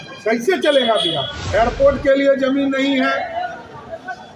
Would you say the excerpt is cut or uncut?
cut